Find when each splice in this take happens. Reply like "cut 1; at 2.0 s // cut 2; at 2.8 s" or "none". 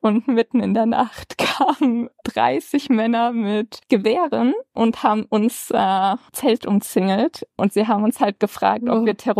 cut 1; at 4.7 s // cut 2; at 6.3 s // cut 3; at 7.5 s